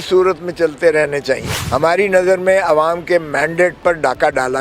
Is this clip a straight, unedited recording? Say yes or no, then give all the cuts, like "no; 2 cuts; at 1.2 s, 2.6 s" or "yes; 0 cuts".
no; 1 cut; at 1.5 s